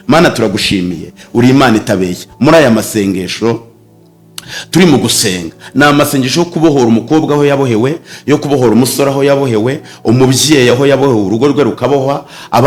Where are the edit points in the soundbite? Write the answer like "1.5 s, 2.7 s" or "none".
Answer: none